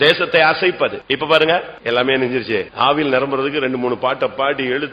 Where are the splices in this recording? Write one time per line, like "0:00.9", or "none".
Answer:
0:01.0
0:01.7
0:02.7